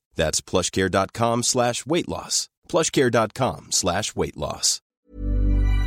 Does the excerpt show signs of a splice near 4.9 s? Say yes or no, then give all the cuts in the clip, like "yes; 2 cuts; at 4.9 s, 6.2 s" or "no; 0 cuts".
yes; 1 cut; at 4.9 s